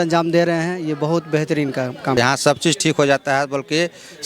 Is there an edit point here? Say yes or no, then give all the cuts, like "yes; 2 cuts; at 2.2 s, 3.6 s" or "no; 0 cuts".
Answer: yes; 1 cut; at 2.1 s